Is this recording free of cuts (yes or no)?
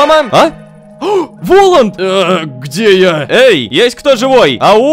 yes